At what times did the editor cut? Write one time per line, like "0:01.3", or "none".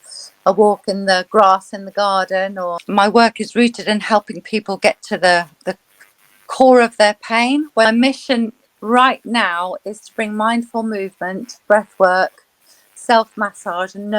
0:02.5
0:07.9